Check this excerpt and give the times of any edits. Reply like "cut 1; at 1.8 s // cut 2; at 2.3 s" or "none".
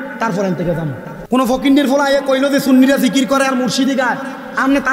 cut 1; at 1.1 s